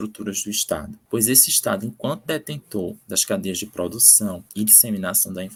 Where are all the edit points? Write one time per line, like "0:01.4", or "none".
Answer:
none